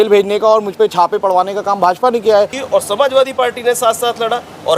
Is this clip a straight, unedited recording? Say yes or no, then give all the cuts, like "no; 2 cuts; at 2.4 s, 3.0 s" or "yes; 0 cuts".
no; 1 cut; at 2.6 s